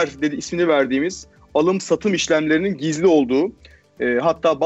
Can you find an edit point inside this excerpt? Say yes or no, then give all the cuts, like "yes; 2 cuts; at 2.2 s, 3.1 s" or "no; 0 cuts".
no; 0 cuts